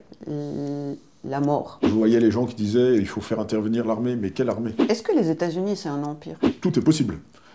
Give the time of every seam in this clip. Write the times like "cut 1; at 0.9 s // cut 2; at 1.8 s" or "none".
cut 1; at 1.9 s // cut 2; at 4.8 s // cut 3; at 6.5 s